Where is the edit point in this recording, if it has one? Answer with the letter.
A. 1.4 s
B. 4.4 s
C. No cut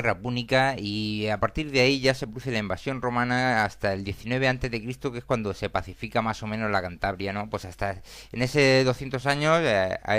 B